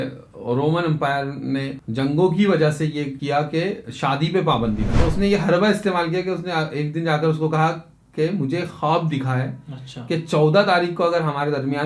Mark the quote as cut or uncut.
cut